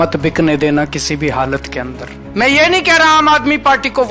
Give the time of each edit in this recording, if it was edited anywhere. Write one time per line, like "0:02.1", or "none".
0:02.2